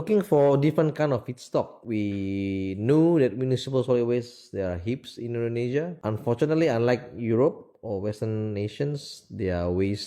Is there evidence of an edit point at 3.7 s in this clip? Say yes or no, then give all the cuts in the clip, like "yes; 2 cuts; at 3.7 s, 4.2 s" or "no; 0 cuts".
no; 2 cuts; at 1.8 s, 5.9 s